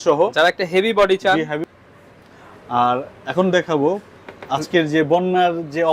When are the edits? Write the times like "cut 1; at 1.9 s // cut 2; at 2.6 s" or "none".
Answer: cut 1; at 1.6 s